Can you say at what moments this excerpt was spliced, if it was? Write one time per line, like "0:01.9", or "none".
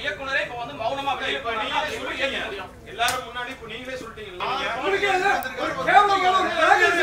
0:04.4